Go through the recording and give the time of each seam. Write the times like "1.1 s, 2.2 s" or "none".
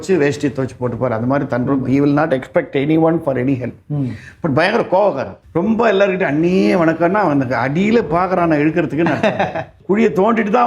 5.4 s, 9.8 s